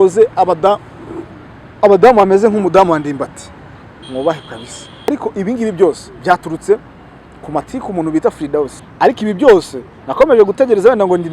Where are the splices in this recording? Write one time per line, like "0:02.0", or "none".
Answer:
0:05.1
0:08.8